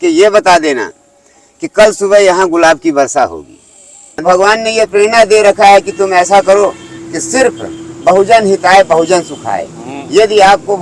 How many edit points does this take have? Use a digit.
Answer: 1